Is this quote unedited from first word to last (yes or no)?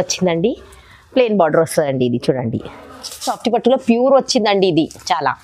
no